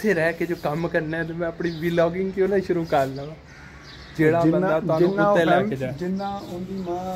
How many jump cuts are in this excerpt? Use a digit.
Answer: 0